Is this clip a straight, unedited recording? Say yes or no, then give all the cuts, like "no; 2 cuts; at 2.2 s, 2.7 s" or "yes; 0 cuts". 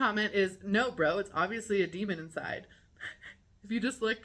yes; 0 cuts